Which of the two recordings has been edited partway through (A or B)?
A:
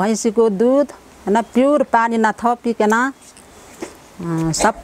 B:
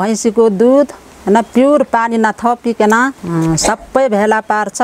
B